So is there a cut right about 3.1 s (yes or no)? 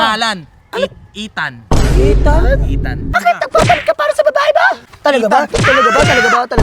yes